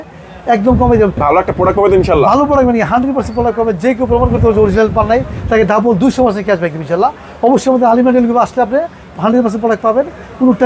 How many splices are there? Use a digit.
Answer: 2